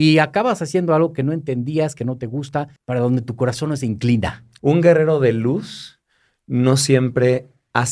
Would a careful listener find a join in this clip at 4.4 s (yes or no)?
yes